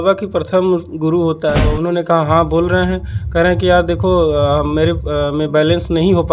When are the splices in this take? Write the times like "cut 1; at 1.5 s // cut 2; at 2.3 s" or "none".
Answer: cut 1; at 1.7 s